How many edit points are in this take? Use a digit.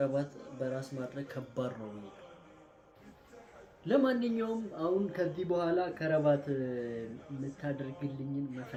0